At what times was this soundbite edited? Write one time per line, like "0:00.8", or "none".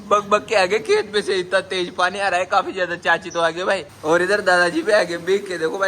none